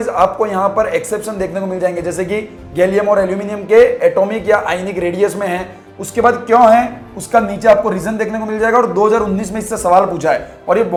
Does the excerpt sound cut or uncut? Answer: uncut